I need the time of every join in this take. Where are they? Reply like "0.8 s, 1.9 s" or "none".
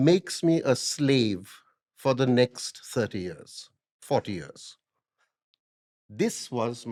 none

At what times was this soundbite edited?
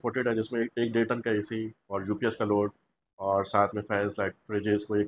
none

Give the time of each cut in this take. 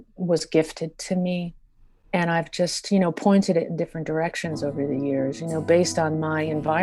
none

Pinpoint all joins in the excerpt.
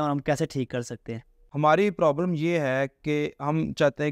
1.3 s

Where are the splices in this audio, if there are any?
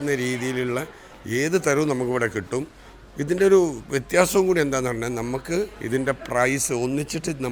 none

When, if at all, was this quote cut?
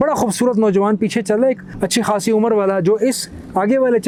none

